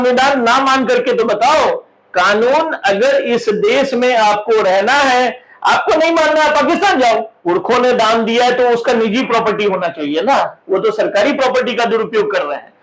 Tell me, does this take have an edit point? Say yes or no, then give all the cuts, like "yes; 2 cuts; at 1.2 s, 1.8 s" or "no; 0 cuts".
yes; 1 cut; at 7.3 s